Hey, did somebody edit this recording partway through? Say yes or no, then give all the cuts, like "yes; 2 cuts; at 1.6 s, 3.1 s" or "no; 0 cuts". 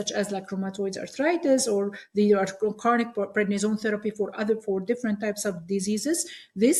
no; 0 cuts